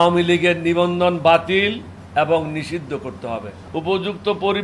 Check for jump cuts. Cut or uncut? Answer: cut